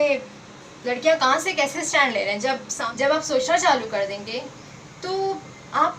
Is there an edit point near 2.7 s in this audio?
yes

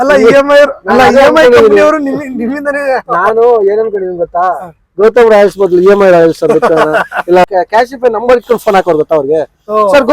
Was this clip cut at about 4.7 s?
no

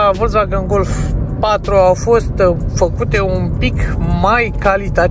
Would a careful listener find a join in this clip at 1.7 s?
no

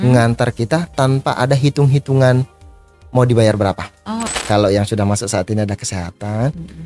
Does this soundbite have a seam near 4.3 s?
yes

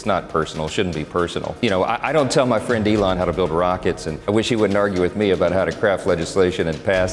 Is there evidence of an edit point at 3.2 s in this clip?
yes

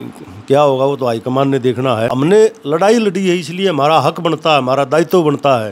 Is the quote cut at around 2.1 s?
yes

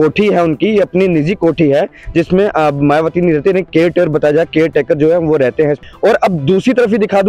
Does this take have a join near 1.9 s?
no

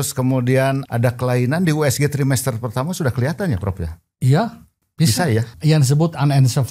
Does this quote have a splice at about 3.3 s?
no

